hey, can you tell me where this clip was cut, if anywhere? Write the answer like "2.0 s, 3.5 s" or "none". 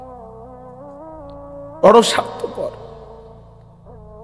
1.9 s